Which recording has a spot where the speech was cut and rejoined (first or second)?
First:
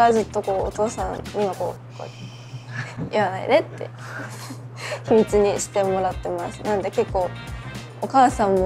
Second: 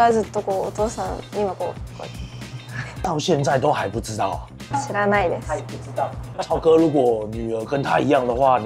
second